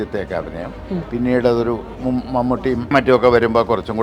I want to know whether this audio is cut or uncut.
cut